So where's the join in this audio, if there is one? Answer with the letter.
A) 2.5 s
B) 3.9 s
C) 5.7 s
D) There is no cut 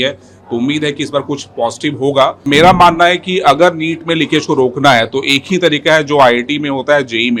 A